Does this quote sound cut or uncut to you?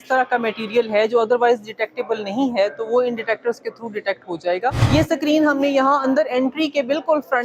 cut